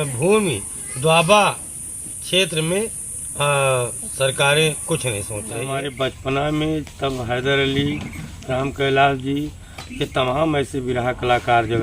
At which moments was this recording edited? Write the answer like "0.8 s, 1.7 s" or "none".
5.6 s